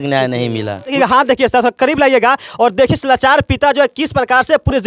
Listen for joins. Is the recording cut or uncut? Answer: cut